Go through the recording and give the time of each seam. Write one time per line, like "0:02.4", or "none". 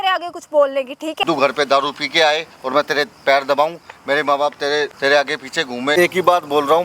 0:01.2
0:04.9
0:05.9